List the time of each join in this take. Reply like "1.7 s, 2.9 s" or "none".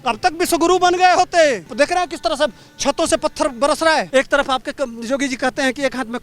1.7 s, 4.1 s